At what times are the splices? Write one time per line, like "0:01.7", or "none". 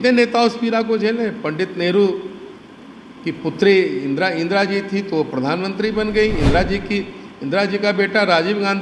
none